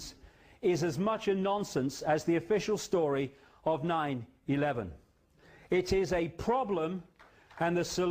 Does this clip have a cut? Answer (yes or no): yes